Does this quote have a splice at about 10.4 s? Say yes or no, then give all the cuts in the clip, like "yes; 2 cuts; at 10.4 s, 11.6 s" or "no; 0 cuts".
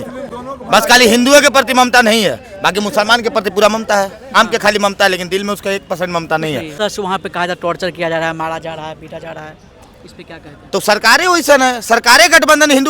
no; 2 cuts; at 4.3 s, 6.7 s